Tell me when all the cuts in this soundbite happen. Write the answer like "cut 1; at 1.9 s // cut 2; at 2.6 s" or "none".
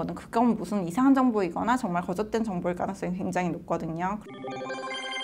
cut 1; at 4.2 s